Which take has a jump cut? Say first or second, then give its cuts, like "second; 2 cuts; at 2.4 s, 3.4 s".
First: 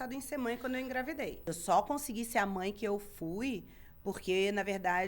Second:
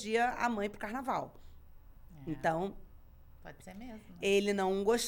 first; 1 cut; at 1.5 s